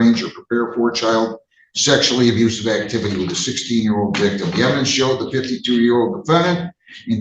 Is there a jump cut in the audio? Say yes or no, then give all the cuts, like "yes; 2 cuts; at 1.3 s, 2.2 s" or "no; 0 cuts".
no; 0 cuts